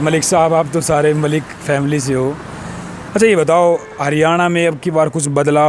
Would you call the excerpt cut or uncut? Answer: uncut